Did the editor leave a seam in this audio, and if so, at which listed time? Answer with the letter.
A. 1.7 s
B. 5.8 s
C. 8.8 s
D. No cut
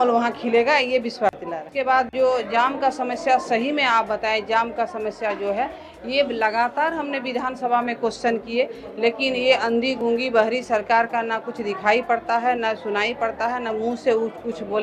A